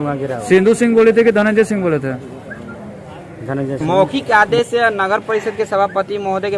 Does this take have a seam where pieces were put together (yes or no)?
yes